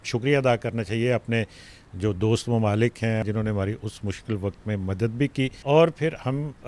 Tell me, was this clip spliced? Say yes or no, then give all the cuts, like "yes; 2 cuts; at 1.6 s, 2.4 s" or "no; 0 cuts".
yes; 2 cuts; at 3.2 s, 5.6 s